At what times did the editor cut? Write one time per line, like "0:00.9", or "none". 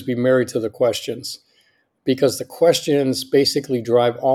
0:01.9

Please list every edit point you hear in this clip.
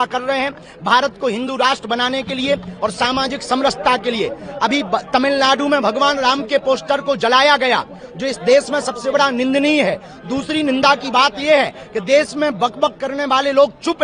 none

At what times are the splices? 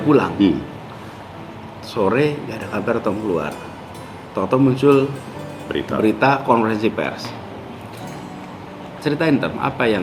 none

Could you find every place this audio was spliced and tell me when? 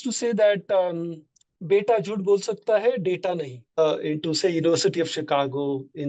0:03.6

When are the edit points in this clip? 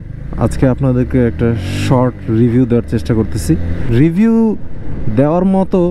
0:03.8

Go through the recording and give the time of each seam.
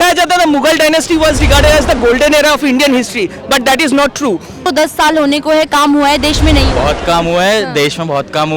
0:04.6

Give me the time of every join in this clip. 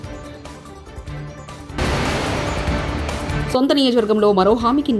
0:01.8
0:03.3

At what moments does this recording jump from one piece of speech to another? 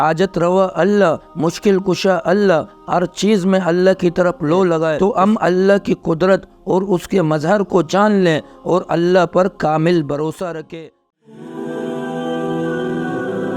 0:04.9
0:10.7

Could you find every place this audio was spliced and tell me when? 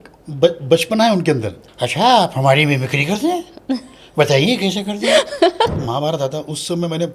0:01.6
0:05.8

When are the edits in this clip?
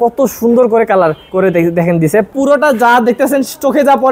0:01.2
0:02.3

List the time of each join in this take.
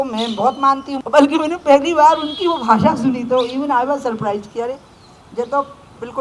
0:00.9

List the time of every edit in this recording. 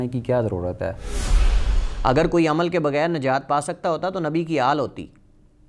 0:01.5

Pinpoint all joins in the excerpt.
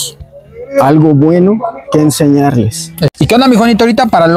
0:03.3

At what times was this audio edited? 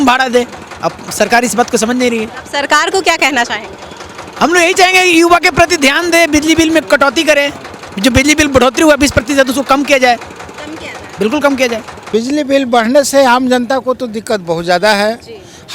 none

